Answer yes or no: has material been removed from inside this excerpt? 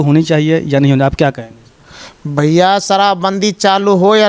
no